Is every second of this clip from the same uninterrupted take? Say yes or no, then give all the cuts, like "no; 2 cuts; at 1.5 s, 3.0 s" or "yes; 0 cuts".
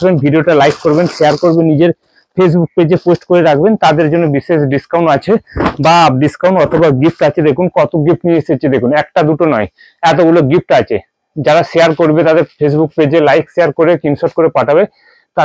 yes; 0 cuts